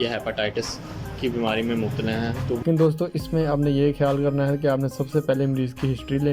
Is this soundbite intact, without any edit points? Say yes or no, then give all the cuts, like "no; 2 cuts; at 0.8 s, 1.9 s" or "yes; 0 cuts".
no; 1 cut; at 2.6 s